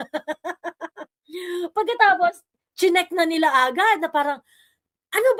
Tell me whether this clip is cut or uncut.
uncut